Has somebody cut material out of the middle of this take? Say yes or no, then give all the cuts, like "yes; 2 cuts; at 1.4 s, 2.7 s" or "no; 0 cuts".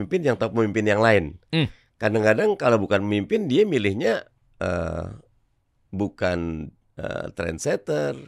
no; 0 cuts